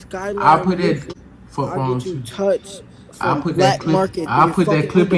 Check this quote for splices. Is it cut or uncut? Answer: cut